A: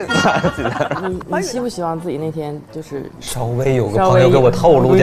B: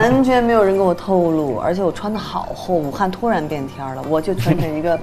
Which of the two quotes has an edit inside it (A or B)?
A